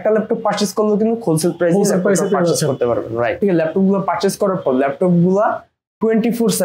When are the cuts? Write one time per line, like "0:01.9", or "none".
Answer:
0:03.4